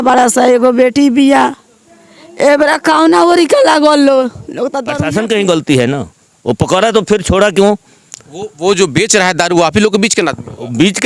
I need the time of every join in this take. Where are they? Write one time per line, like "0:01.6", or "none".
0:04.8